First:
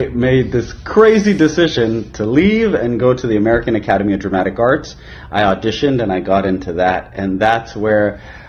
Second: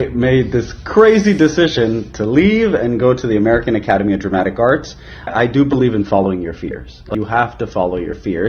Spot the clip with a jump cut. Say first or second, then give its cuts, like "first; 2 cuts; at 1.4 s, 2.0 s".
second; 2 cuts; at 5.3 s, 7.0 s